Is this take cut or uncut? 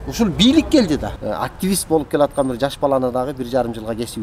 cut